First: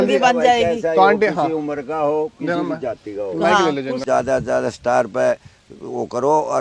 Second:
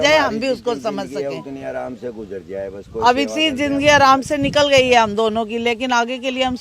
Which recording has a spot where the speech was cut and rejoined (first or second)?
first